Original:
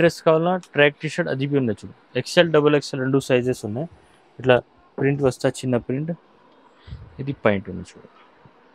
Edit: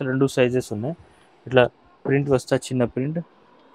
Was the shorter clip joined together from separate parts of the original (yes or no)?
no